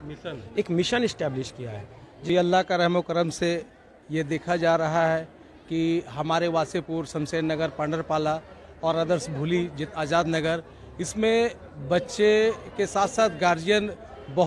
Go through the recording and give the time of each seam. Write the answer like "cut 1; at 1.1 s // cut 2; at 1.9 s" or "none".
cut 1; at 2.1 s